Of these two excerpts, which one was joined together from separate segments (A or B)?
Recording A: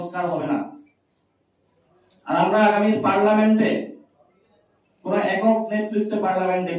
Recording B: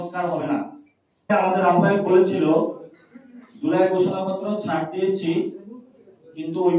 B